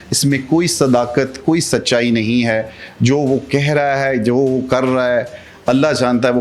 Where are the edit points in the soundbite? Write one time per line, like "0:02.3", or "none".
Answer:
none